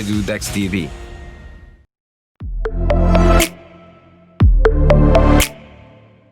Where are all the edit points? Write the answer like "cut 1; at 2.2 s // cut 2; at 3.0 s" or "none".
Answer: cut 1; at 2.4 s